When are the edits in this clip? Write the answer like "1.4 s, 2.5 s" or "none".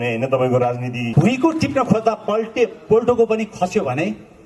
1.1 s